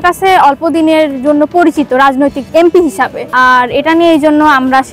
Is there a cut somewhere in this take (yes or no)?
yes